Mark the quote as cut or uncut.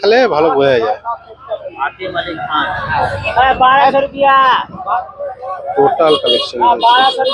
uncut